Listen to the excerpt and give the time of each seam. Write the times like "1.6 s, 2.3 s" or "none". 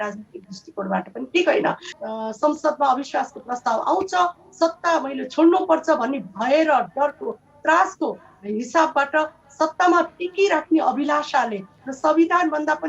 1.9 s